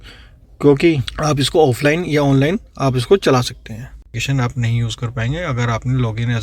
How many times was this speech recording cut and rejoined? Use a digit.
2